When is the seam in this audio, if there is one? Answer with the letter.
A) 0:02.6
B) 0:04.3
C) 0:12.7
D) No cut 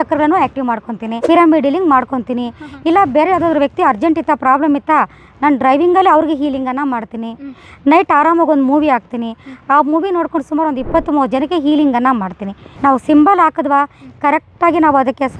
C